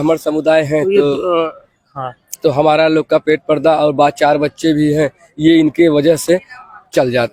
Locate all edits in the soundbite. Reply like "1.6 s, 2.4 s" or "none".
none